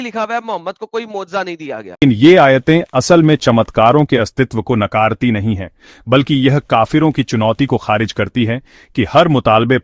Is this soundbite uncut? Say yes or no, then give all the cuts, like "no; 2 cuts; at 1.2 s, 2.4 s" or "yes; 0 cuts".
no; 1 cut; at 2.0 s